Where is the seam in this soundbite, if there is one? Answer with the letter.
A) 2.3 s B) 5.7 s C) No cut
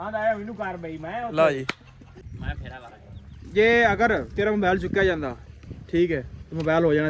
A